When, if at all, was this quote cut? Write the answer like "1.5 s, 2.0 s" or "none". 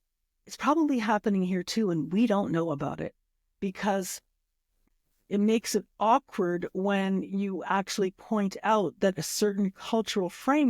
4.8 s